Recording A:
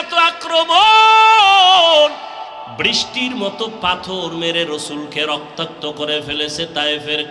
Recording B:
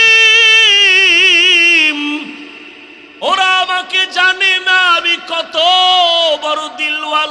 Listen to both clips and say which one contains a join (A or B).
A